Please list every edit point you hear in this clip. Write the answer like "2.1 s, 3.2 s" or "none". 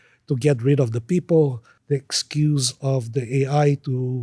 1.7 s